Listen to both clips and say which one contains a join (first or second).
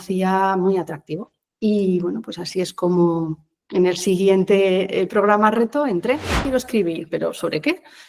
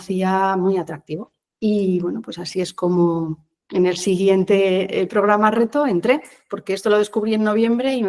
first